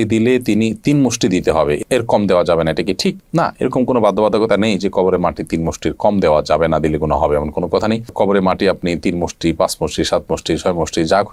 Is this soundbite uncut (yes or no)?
yes